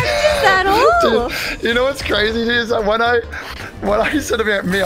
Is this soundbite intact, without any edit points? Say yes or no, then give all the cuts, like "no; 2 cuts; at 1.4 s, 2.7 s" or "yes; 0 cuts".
yes; 0 cuts